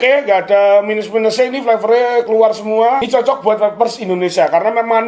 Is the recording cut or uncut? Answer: cut